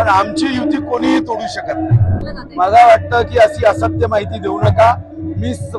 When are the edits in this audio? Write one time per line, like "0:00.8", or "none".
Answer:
0:02.2